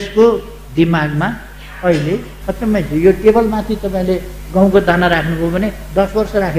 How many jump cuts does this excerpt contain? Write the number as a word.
one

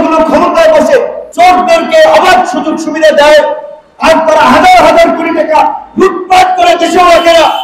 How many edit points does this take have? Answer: one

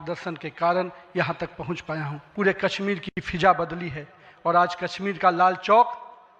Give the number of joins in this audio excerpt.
one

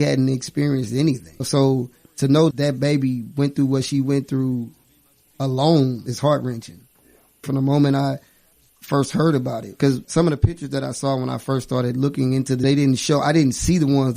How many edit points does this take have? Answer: two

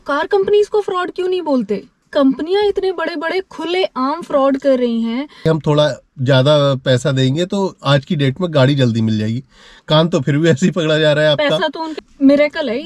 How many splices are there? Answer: three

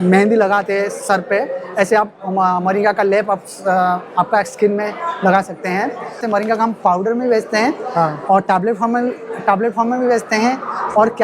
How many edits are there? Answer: one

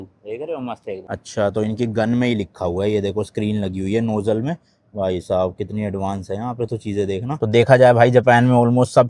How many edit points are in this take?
one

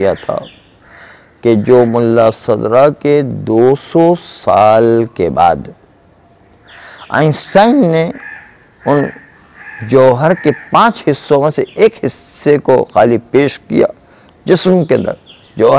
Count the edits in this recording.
zero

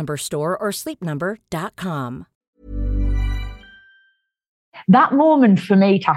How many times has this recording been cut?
two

